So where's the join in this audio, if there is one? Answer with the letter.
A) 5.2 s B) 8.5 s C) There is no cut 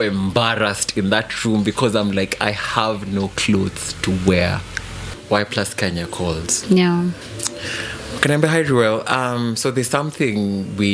A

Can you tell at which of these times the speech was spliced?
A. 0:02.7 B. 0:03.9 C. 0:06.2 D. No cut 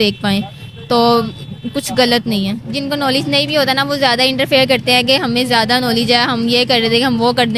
A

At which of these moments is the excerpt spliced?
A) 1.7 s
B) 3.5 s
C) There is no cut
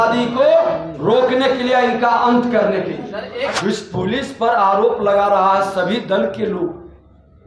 B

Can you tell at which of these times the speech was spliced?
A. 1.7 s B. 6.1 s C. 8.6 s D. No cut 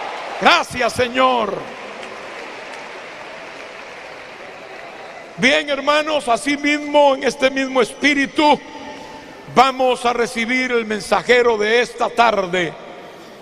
A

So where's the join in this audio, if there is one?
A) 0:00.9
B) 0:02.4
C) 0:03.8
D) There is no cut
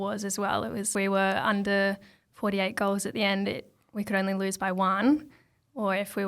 A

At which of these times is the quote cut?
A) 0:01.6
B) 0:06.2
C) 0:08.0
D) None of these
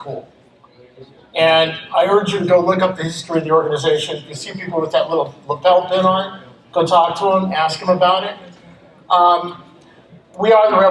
D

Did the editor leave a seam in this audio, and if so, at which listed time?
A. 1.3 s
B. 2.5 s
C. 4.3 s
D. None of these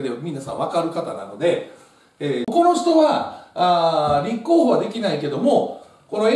B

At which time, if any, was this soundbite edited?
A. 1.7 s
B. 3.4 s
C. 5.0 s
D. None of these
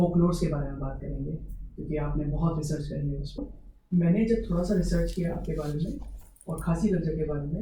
B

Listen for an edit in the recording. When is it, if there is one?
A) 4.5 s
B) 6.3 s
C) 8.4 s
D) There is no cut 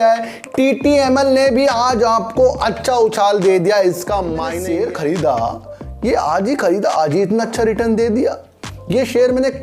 A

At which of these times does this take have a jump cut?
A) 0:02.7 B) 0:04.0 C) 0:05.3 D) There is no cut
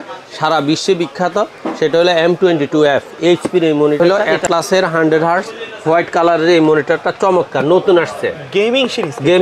B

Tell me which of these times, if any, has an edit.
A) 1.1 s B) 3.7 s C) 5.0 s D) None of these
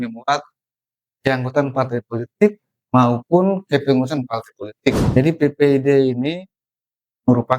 C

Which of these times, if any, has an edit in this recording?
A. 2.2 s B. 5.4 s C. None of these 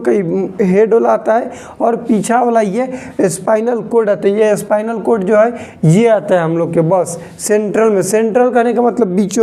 C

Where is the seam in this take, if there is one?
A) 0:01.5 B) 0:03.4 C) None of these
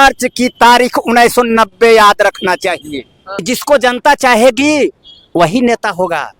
B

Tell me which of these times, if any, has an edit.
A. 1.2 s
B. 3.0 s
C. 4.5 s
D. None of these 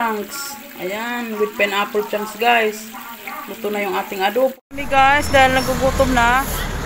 C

